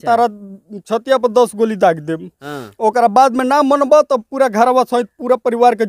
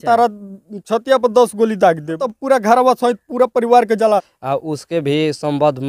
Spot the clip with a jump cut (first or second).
second